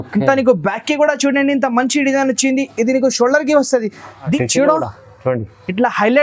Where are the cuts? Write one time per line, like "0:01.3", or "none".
0:04.2